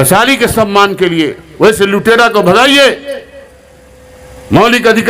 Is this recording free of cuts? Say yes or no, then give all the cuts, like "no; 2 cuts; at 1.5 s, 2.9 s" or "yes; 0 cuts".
yes; 0 cuts